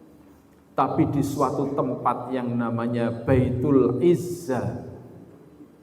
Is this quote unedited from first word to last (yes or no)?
yes